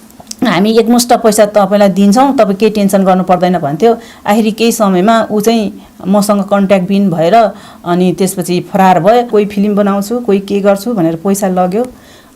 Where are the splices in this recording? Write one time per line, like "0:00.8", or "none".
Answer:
0:09.3

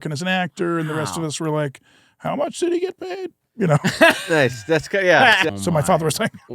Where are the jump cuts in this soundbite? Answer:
0:05.5

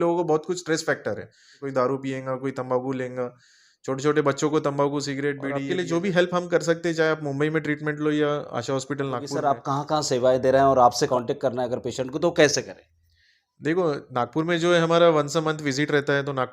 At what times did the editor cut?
0:01.6
0:05.5
0:09.3
0:11.1

